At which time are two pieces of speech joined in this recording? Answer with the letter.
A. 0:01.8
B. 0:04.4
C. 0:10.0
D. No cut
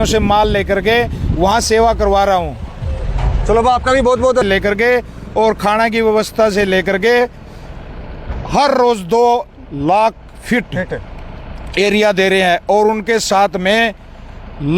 B